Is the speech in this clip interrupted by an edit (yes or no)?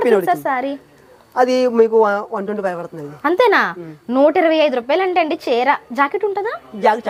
no